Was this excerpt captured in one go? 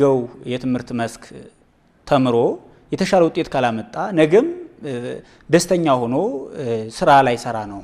yes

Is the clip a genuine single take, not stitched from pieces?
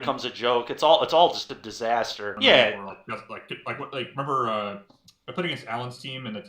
no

